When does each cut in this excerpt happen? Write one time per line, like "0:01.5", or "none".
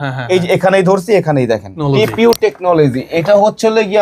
0:01.7